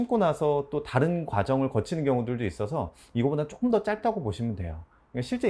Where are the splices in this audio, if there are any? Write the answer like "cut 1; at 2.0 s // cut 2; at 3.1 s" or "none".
none